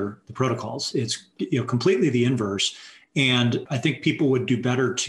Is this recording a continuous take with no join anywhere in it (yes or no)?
no